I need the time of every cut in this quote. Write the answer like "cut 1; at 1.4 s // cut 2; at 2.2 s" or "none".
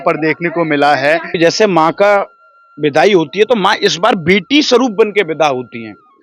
cut 1; at 1.3 s